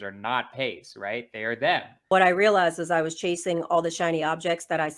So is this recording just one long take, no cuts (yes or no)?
no